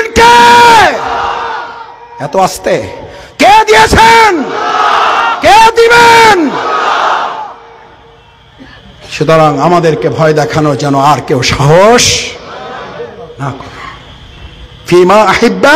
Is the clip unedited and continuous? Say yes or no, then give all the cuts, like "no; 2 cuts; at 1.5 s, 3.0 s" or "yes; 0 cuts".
yes; 0 cuts